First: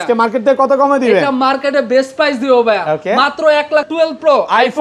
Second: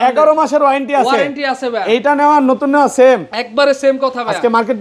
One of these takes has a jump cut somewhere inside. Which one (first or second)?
first